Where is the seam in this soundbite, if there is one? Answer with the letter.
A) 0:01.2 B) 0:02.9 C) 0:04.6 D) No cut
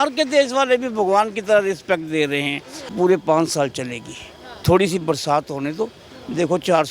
B